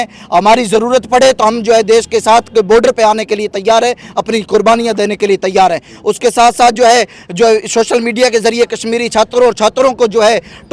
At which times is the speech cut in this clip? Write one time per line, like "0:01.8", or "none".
none